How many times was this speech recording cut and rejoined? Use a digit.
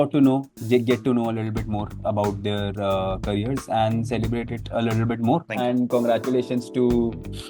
1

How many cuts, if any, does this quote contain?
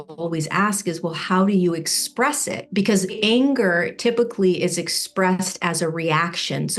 1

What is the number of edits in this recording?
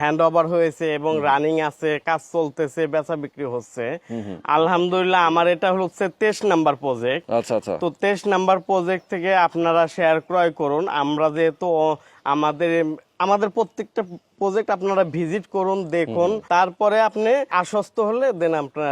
2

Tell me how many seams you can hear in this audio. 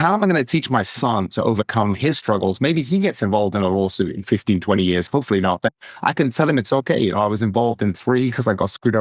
0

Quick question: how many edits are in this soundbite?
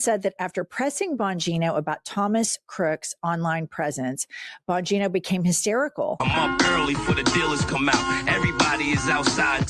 1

